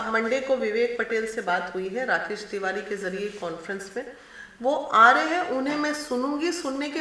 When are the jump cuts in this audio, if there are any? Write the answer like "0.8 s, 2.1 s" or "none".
none

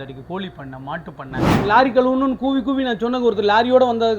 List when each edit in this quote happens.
1.4 s

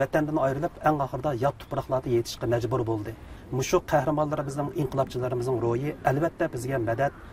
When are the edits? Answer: 3.4 s

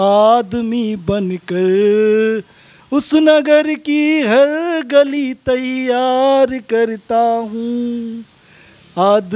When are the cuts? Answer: none

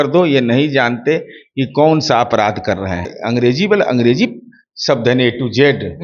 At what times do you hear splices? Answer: 3.2 s

